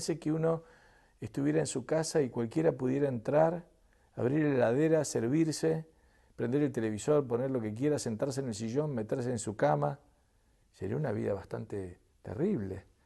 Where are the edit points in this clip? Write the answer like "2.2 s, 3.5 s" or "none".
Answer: 4.7 s